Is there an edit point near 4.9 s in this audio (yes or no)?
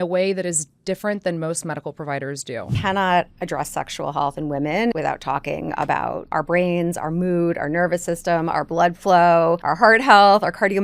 yes